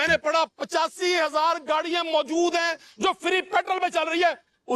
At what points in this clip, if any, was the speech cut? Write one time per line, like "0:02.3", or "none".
none